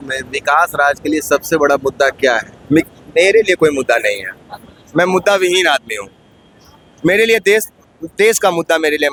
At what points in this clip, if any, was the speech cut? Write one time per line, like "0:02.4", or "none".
none